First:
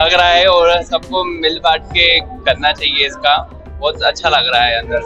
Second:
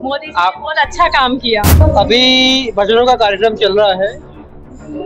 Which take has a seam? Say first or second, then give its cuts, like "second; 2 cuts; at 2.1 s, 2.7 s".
second; 1 cut; at 1.8 s